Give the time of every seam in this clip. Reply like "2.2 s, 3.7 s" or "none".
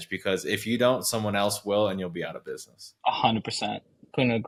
none